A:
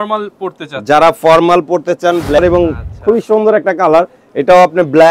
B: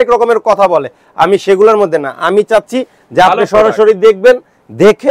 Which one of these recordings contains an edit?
A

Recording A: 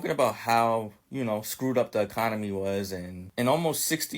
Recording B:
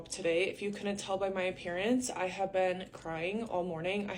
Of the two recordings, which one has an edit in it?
A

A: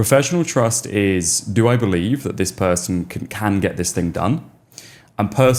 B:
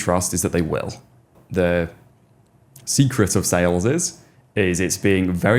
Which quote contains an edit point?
B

